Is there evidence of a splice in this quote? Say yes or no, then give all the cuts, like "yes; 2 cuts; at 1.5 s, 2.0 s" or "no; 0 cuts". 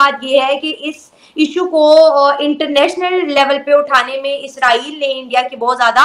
no; 0 cuts